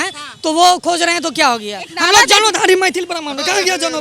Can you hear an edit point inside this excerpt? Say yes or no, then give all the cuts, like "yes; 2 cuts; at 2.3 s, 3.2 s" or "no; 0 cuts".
no; 0 cuts